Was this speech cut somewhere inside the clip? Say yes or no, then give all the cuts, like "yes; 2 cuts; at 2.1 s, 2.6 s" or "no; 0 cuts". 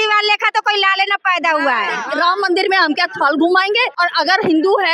yes; 2 cuts; at 2.0 s, 3.9 s